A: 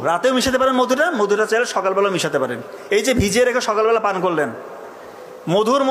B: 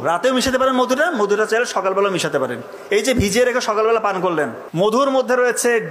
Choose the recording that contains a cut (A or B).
B